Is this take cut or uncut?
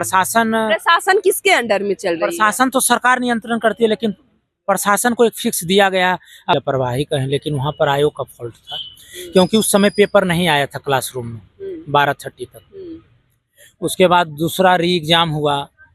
cut